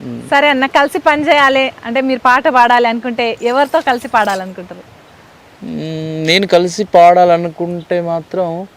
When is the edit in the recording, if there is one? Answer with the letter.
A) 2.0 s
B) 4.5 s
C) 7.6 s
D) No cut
D